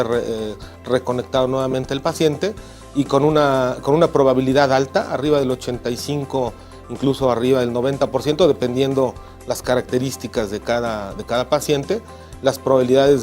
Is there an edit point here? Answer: yes; 1 cut; at 3.1 s

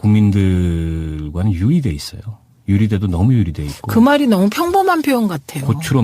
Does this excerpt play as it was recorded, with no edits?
no; 1 cut; at 3.1 s

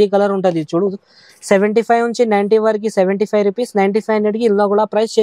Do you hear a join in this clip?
no; 0 cuts

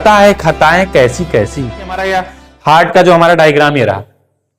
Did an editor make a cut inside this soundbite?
yes; 1 cut; at 2.0 s

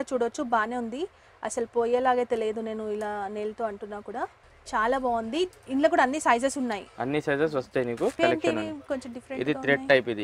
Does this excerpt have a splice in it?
yes; 2 cuts; at 4.4 s, 8.2 s

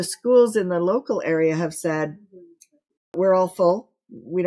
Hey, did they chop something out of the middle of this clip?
yes; 1 cut; at 3.1 s

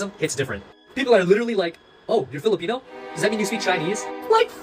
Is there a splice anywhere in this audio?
no; 0 cuts

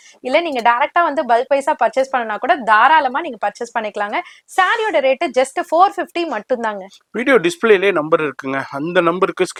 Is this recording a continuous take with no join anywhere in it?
yes; 0 cuts

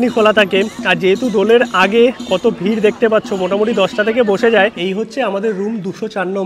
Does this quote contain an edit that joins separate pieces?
yes; 1 cut; at 4.8 s

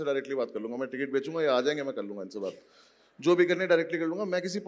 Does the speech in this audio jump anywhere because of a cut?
no; 0 cuts

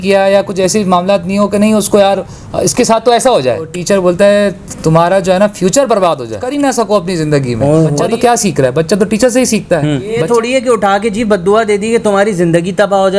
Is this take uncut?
no; 4 cuts; at 3.8 s, 5.9 s, 8.0 s, 10.2 s

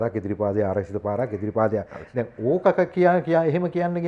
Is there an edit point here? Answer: no; 0 cuts

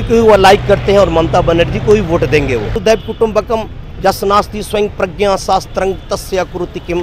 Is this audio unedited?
no; 1 cut; at 2.8 s

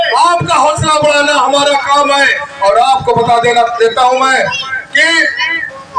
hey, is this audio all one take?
yes; 0 cuts

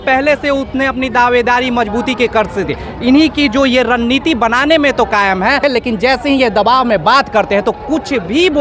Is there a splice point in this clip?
yes; 1 cut; at 5.6 s

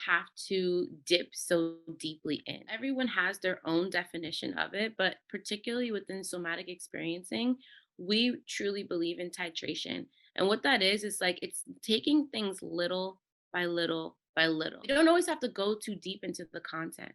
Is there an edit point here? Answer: yes; 2 cuts; at 2.8 s, 14.9 s

